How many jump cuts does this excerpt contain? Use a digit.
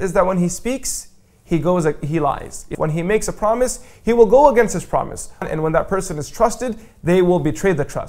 2